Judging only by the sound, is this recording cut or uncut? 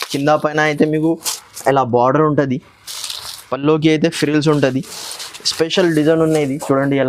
uncut